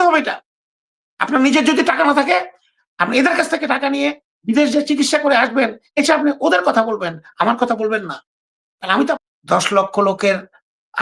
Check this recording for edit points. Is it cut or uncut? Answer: cut